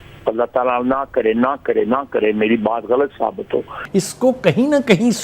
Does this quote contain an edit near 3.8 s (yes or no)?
yes